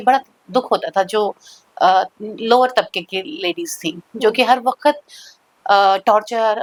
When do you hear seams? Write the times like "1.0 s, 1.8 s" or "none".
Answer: none